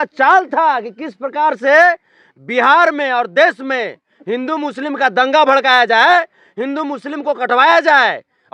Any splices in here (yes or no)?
no